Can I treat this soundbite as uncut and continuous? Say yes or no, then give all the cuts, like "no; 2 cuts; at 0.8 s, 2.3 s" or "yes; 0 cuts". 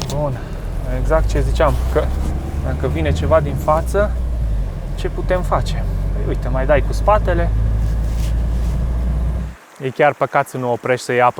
no; 1 cut; at 9.5 s